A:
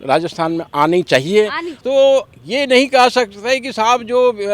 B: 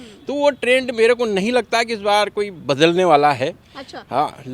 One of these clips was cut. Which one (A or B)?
A